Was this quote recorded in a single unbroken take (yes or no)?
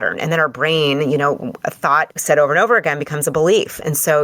no